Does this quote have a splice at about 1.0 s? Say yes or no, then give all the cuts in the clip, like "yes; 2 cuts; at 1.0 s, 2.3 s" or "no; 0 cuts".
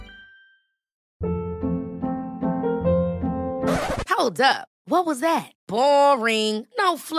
yes; 1 cut; at 1.0 s